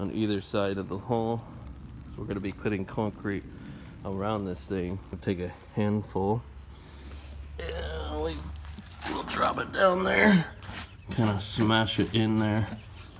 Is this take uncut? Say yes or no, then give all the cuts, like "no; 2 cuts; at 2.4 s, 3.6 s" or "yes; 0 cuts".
no; 1 cut; at 5.2 s